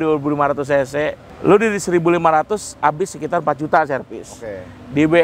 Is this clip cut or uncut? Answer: cut